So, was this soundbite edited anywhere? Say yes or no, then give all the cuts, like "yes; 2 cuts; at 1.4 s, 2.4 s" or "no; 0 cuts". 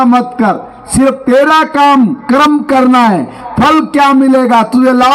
no; 0 cuts